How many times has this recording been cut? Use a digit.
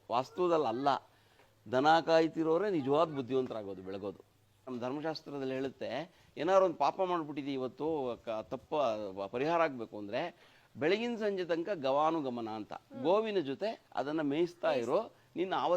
1